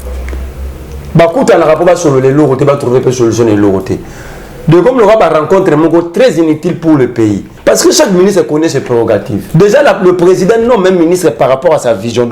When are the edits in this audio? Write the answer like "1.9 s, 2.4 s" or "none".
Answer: 7.5 s, 9.4 s

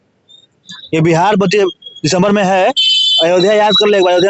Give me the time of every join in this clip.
none

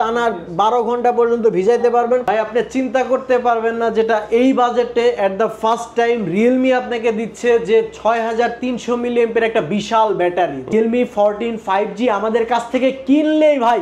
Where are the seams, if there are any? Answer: 2.2 s, 10.7 s

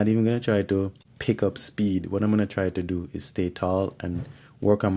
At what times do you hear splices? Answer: 1.1 s

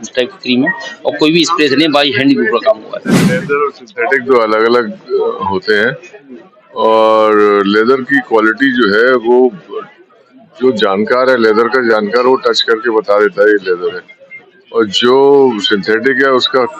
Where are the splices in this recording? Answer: 3.3 s

